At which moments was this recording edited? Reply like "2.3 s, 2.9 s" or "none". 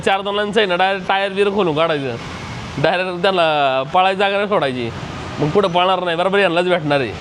none